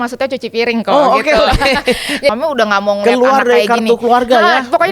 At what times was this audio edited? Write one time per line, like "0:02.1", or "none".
0:02.3